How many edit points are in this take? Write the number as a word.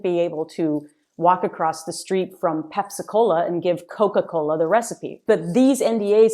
one